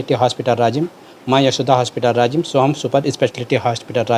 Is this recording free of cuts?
yes; 0 cuts

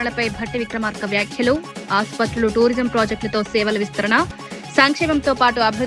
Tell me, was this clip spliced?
no; 0 cuts

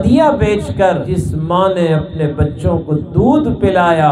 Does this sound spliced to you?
yes; 1 cut; at 1.1 s

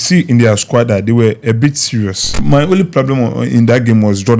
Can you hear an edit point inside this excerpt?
yes; 1 cut; at 2.4 s

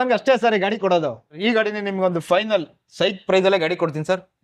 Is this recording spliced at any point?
yes; 1 cut; at 1.4 s

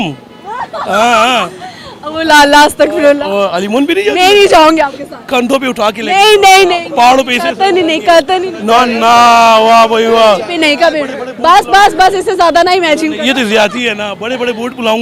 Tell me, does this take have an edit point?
no; 0 cuts

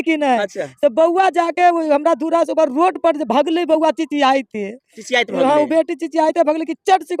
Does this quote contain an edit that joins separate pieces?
no; 0 cuts

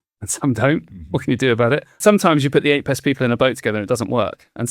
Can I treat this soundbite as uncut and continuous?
no; 1 cut; at 1.9 s

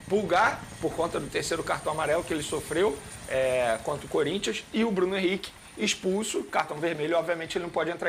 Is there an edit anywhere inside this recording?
no; 0 cuts

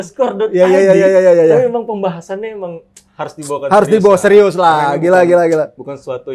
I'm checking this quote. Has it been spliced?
no; 0 cuts

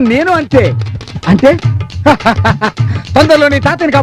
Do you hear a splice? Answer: yes; 1 cut; at 2.2 s

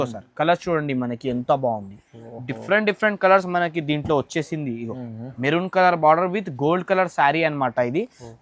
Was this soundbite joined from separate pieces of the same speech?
no; 0 cuts

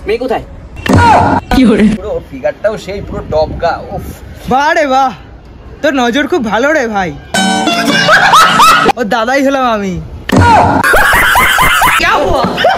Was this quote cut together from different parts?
yes; 2 cuts; at 2.0 s, 12.0 s

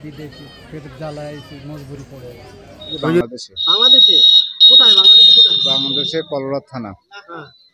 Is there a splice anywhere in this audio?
yes; 1 cut; at 3.2 s

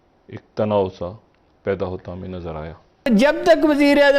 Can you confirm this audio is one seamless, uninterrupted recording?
no; 1 cut; at 3.1 s

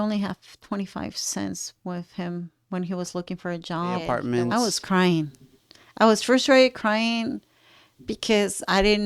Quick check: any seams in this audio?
yes; 1 cut; at 4.2 s

